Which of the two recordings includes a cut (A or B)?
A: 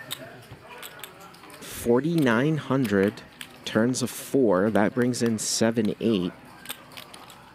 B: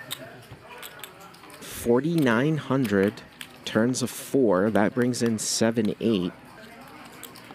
B